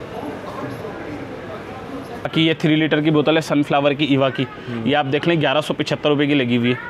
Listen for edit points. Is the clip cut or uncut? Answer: cut